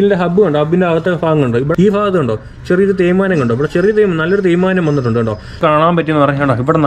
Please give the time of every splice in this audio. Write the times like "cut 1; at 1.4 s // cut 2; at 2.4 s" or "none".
cut 1; at 1.7 s // cut 2; at 5.6 s